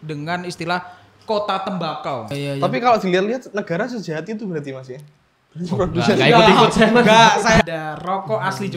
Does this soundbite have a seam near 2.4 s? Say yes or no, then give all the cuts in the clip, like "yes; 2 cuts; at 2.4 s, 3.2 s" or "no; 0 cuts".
yes; 2 cuts; at 2.4 s, 7.6 s